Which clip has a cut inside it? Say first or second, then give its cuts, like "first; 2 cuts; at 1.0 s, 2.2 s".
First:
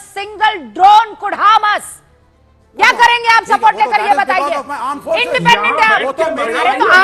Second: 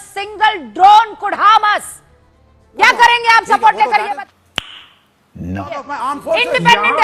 first; 1 cut; at 4.4 s